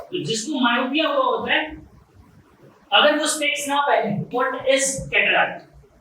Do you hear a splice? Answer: yes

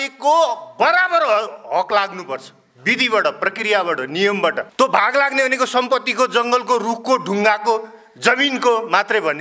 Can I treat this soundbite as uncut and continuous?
no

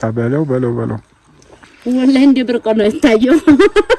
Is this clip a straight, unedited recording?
no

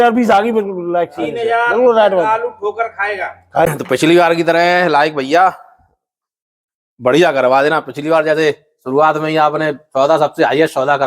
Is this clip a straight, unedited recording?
no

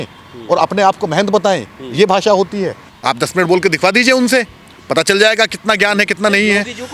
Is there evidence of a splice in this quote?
yes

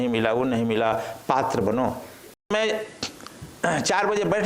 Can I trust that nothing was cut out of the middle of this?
no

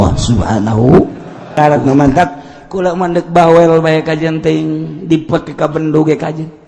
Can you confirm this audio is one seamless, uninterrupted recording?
no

